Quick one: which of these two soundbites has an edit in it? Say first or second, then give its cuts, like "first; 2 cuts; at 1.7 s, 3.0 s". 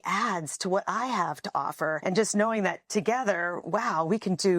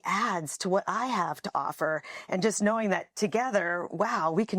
first; 1 cut; at 2.0 s